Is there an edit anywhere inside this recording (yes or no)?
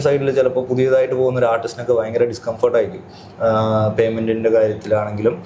no